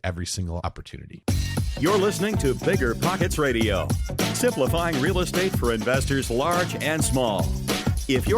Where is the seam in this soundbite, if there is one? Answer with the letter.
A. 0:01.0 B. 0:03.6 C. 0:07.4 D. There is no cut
A